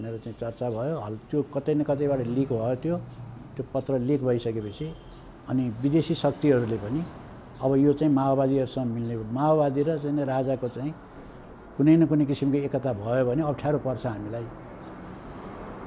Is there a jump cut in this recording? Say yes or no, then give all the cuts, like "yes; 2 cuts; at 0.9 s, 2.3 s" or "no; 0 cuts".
no; 0 cuts